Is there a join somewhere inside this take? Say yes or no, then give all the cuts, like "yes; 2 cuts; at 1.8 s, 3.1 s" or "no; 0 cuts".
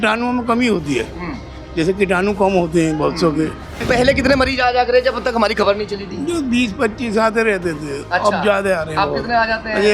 yes; 1 cut; at 3.8 s